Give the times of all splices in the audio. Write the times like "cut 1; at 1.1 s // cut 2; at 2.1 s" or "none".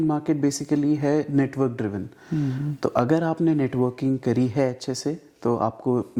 none